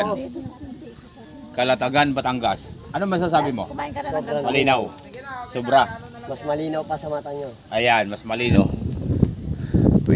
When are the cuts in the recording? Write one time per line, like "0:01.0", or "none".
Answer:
0:08.5